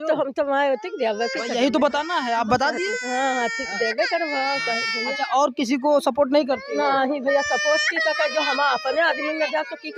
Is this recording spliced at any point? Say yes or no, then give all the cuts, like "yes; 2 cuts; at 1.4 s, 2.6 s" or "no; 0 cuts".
no; 0 cuts